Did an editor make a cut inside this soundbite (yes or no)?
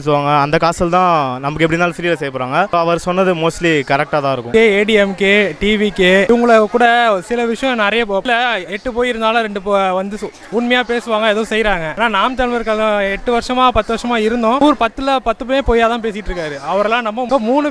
no